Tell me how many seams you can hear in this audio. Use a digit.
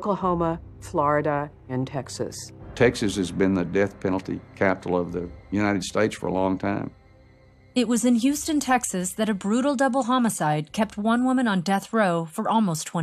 0